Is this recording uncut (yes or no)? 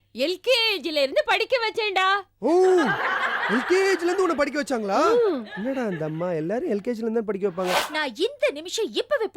no